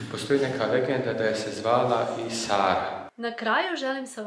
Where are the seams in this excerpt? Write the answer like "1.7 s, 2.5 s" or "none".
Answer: 3.1 s